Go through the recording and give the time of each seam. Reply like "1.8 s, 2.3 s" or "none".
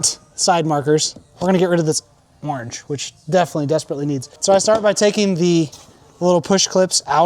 none